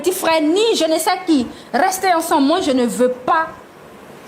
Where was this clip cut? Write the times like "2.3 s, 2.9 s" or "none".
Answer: none